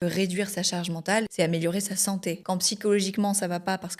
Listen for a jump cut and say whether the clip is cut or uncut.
cut